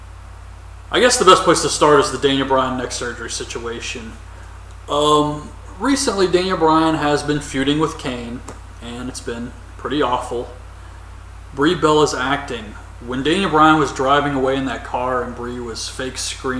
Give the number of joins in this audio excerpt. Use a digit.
1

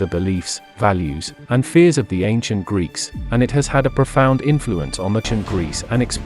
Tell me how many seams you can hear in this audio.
1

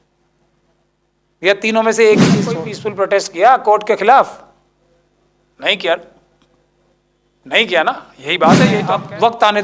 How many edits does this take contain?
2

